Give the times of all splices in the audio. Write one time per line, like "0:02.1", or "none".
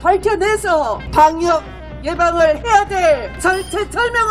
0:01.0
0:03.4